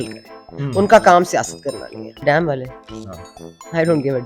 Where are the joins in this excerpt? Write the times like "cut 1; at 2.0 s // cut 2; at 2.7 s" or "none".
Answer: cut 1; at 2.1 s